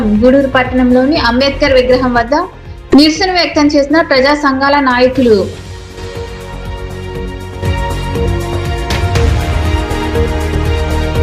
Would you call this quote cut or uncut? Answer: uncut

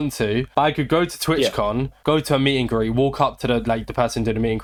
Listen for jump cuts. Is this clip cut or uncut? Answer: uncut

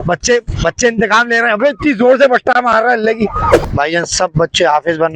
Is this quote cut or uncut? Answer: cut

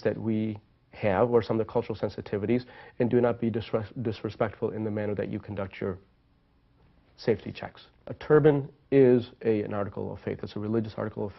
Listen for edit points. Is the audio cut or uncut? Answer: uncut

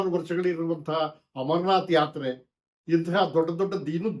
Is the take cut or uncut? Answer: uncut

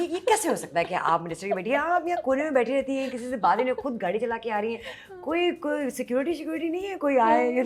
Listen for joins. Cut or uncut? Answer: uncut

